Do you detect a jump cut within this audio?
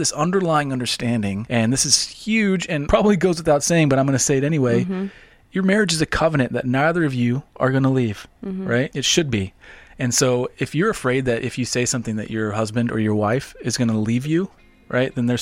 yes; 3 cuts; at 1.4 s, 2.8 s, 9.0 s

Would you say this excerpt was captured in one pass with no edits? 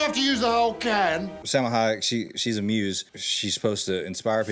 no; 2 cuts; at 1.4 s, 3.1 s

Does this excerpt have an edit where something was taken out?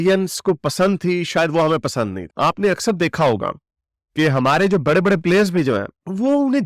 yes; 1 cut; at 2.2 s

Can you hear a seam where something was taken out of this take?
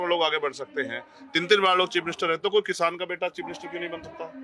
no; 0 cuts

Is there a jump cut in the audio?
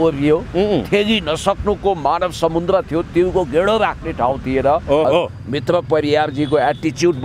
yes; 1 cut; at 5.0 s

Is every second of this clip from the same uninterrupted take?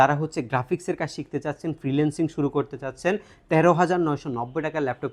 yes; 0 cuts

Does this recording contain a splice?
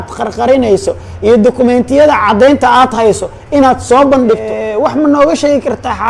yes; 1 cut; at 4.5 s

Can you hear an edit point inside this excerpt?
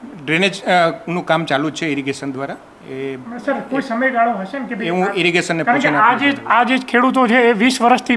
no; 0 cuts

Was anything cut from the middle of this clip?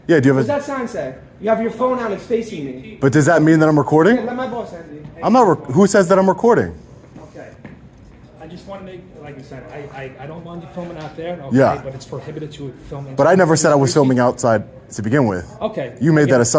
no; 0 cuts

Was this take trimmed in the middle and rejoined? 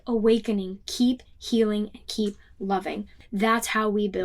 yes; 1 cut; at 3.1 s

